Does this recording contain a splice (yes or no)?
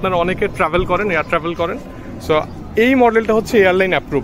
no